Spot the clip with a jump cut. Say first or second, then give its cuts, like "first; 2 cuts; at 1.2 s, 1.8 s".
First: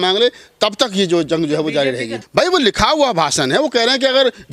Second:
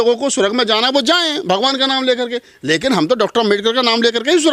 first; 1 cut; at 2.2 s